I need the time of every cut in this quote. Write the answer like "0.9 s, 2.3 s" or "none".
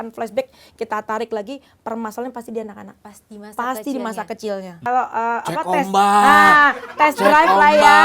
4.8 s